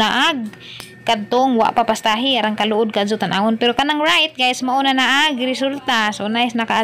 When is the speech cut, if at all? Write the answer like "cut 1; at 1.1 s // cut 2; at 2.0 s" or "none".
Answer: none

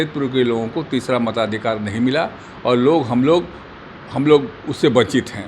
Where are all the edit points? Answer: none

